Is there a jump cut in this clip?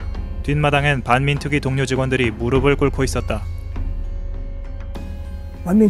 no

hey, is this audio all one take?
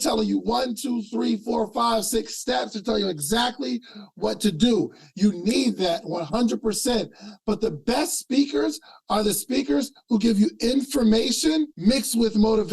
no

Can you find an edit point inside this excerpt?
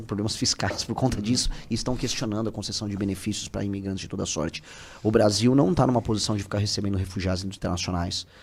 no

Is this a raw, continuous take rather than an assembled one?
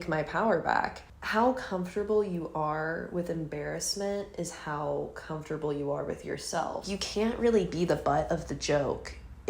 no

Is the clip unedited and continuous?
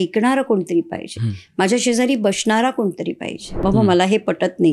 no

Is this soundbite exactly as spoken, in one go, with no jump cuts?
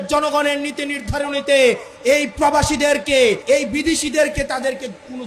no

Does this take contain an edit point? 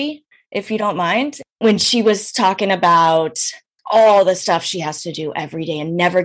yes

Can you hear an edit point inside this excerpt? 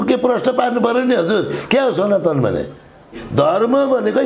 yes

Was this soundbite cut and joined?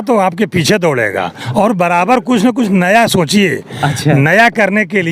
yes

